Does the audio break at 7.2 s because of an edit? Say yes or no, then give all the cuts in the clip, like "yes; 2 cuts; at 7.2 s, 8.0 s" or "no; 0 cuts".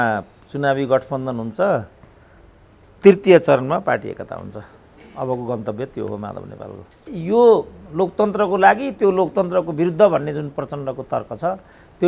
yes; 1 cut; at 7.2 s